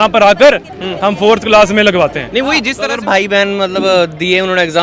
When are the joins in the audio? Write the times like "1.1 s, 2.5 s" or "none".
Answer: 2.7 s